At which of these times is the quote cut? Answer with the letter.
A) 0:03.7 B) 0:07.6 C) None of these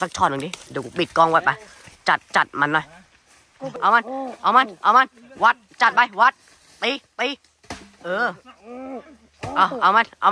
A